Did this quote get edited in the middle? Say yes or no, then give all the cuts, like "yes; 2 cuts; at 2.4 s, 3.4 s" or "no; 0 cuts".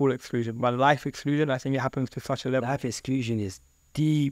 no; 0 cuts